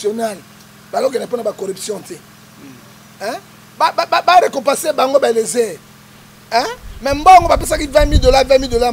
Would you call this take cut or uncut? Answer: uncut